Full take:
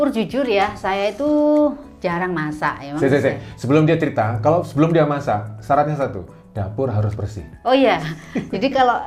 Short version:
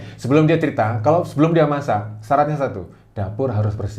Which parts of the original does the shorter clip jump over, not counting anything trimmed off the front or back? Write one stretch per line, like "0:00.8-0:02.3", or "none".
none